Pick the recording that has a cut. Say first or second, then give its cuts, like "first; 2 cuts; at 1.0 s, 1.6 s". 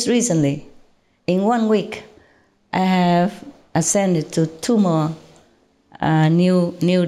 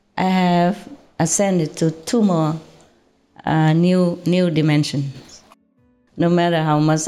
second; 1 cut; at 5.9 s